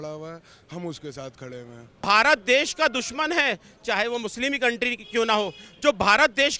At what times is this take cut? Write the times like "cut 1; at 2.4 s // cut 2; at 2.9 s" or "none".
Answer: cut 1; at 2.0 s